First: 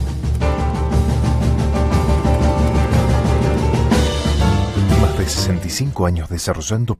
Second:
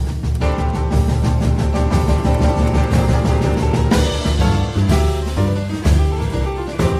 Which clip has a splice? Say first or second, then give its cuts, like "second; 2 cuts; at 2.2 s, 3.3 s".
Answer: first; 1 cut; at 5.2 s